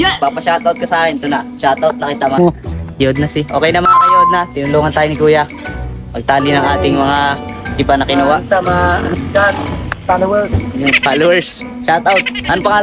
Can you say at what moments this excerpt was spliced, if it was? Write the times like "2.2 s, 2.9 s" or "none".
2.4 s